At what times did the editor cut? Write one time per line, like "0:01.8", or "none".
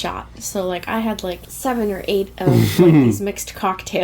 0:01.5

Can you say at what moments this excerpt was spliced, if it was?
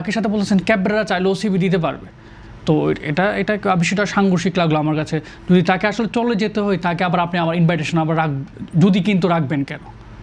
none

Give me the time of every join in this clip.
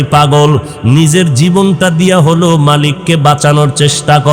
none

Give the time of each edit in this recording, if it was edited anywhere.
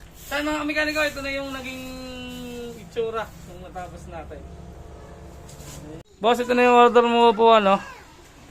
0:06.1

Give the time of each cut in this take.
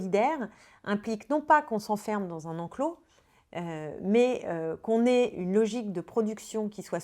none

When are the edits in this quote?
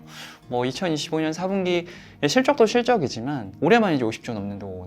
0:03.4

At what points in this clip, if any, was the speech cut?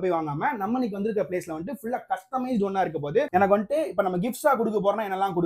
0:03.3

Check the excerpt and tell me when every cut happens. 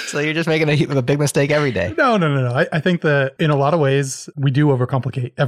0:03.3
0:04.2

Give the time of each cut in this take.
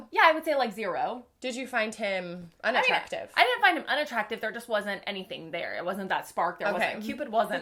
none

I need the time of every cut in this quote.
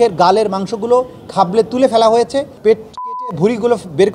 0:02.9

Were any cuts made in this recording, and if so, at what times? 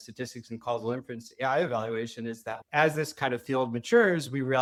none

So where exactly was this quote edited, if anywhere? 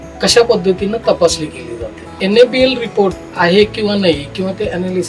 0:02.2

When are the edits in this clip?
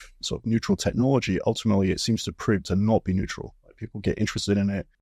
none

